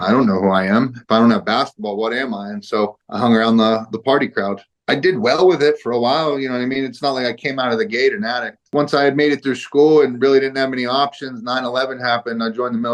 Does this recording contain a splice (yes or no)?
yes